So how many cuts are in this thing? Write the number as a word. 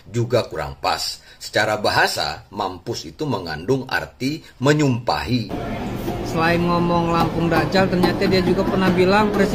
one